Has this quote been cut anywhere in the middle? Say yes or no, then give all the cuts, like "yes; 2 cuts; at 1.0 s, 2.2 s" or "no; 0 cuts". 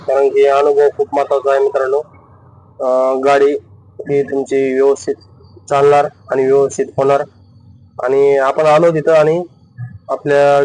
no; 0 cuts